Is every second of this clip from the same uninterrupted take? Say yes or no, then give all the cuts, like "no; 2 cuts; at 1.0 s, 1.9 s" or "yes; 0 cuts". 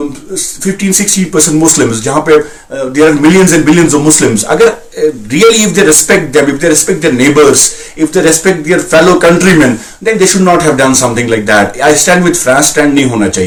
yes; 0 cuts